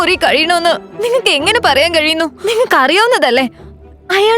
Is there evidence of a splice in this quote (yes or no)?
yes